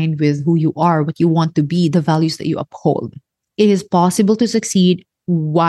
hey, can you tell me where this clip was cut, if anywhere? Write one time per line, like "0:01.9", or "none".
0:03.4